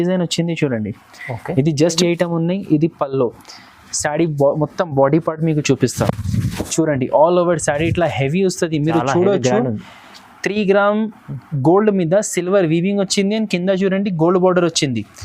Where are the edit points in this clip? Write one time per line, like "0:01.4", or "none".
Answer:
0:02.0